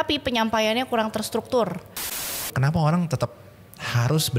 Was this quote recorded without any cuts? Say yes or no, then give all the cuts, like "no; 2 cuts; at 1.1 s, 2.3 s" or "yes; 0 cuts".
no; 1 cut; at 2.3 s